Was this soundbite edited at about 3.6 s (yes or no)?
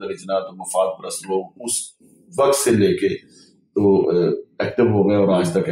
no